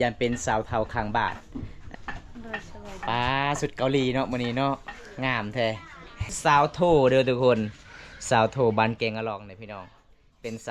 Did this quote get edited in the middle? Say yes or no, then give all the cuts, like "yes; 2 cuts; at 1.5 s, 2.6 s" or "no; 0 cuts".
yes; 2 cuts; at 1.8 s, 6.2 s